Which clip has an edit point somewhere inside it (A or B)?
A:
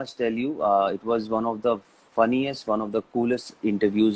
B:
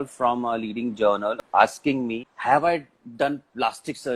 B